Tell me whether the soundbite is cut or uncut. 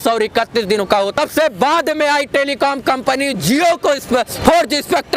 cut